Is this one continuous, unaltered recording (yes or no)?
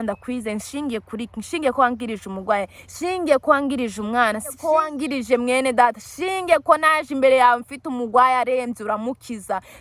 no